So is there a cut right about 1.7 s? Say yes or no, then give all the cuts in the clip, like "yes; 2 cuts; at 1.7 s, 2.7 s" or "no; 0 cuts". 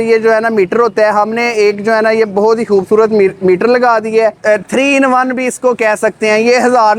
no; 1 cut; at 4.4 s